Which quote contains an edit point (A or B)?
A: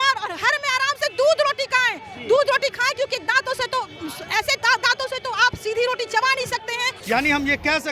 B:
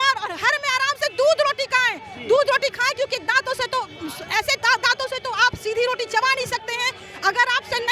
A